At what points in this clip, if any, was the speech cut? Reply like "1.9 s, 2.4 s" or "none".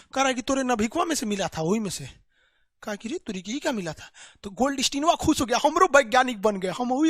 none